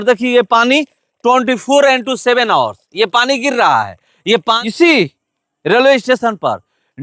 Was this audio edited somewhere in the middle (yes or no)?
yes